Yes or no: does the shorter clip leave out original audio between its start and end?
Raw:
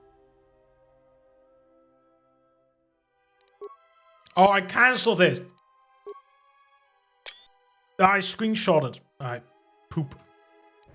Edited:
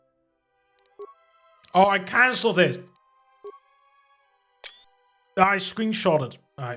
no